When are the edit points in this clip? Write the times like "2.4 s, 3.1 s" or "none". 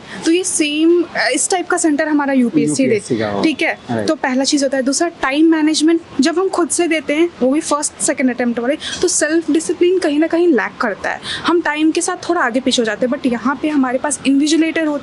none